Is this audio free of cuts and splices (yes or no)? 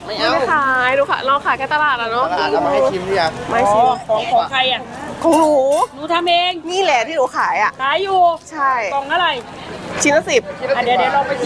yes